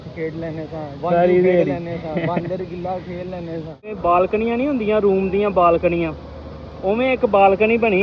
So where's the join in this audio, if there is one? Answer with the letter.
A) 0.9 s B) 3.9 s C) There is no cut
B